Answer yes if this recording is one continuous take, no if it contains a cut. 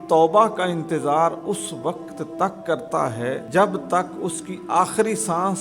no